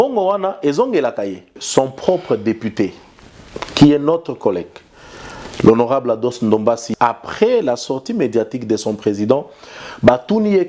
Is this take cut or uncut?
cut